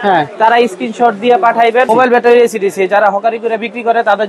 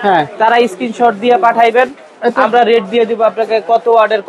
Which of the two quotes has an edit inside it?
first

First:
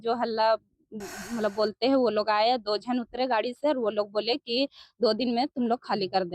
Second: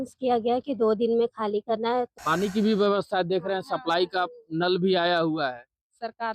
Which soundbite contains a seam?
second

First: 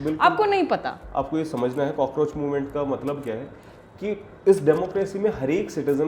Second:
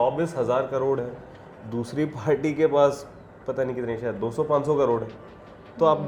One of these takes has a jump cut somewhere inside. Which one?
first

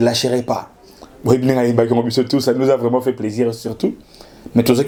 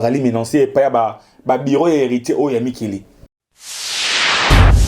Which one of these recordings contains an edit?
second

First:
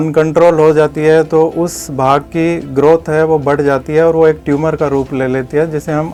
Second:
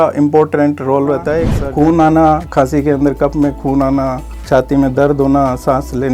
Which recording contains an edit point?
second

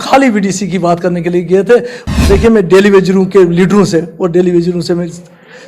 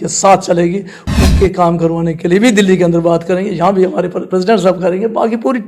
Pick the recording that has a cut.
first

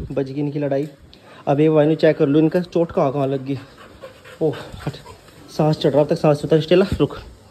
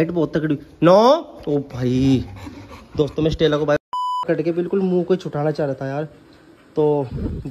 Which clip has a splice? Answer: second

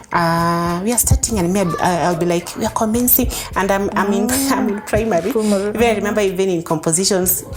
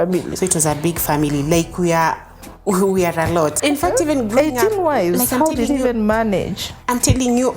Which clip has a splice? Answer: second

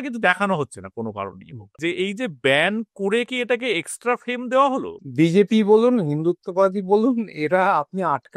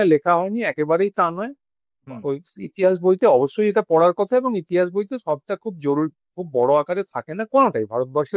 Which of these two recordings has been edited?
first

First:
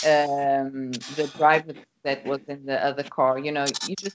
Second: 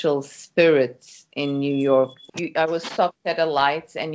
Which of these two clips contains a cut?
second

